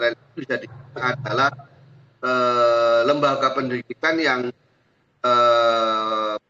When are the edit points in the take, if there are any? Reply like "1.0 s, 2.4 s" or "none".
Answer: none